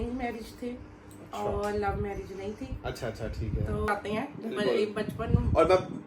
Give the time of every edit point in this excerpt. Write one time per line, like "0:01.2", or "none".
0:03.9